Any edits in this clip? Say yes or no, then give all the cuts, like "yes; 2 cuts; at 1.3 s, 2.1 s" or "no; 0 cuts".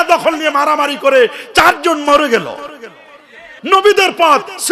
yes; 1 cut; at 3.5 s